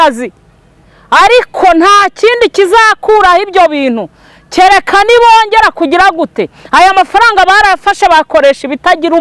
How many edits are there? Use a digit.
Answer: 0